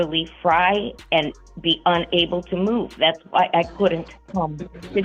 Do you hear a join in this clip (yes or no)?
yes